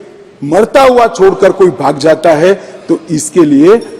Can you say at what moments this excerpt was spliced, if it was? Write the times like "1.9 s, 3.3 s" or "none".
none

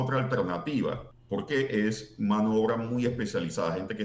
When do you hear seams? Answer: 1.1 s

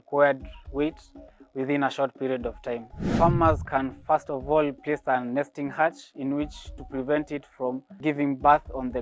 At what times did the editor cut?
3.0 s

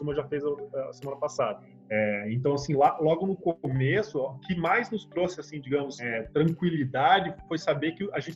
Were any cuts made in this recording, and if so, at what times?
1.7 s, 4.5 s, 6.1 s

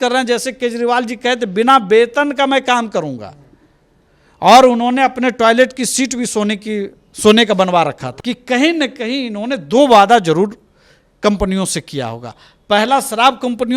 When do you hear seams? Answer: 8.1 s

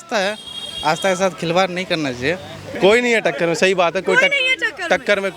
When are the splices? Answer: 2.7 s

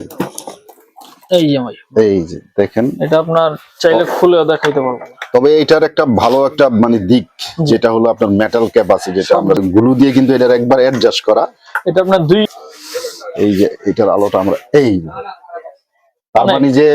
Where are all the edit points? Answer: 9.6 s, 12.5 s

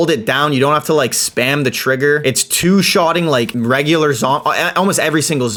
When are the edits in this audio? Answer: none

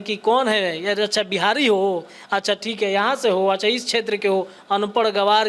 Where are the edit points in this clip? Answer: none

